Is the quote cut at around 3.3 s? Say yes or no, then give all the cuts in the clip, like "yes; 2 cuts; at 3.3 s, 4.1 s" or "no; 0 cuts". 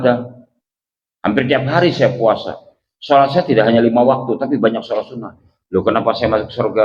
no; 0 cuts